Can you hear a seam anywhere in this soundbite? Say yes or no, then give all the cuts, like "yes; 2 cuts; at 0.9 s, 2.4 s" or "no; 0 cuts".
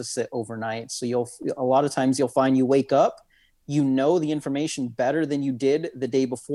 no; 0 cuts